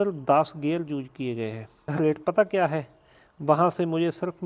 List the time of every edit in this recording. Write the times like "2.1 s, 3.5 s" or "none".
1.9 s